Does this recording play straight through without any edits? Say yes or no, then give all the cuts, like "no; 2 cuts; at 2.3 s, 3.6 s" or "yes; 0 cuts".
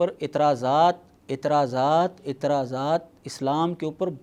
yes; 0 cuts